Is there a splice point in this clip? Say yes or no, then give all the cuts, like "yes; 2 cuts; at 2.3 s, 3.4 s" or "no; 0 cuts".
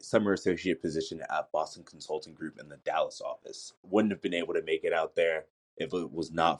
yes; 1 cut; at 3.8 s